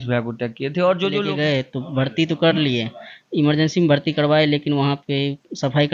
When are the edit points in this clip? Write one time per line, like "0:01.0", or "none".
0:01.3